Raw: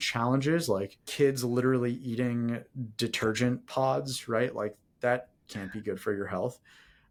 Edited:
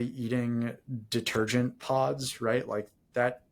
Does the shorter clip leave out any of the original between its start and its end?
no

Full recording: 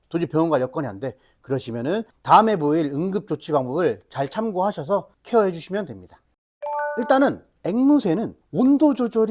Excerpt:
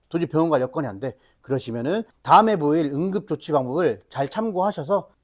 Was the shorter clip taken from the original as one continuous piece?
yes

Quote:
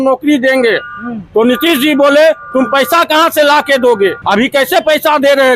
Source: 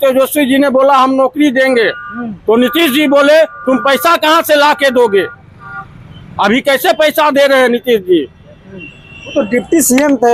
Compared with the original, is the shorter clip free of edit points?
no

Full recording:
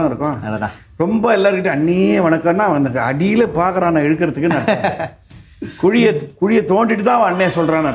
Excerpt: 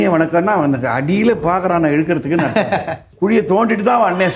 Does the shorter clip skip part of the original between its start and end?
yes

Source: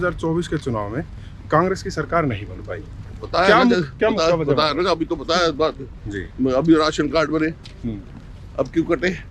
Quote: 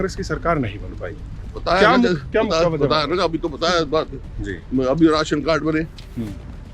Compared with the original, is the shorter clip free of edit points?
yes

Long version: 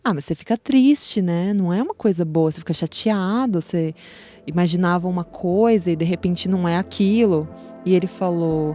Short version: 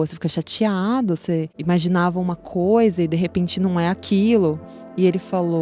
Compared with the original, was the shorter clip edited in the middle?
yes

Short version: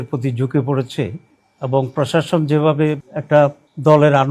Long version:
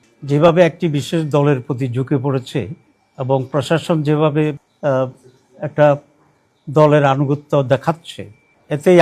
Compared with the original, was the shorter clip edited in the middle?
yes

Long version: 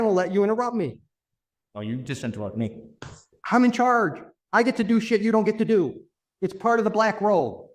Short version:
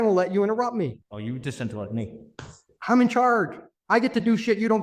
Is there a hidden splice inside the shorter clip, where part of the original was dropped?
yes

